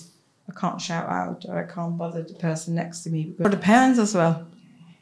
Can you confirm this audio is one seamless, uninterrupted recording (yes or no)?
no